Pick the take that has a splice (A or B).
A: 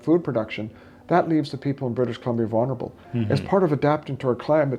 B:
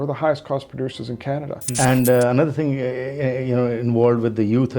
B